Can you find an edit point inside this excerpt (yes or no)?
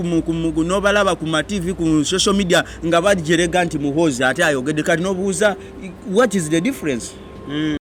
no